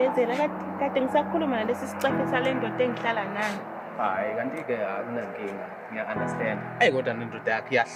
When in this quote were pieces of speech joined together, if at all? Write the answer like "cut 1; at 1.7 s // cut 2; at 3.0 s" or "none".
none